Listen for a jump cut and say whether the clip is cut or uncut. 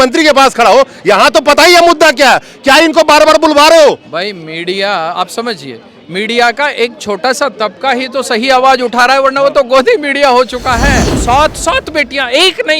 cut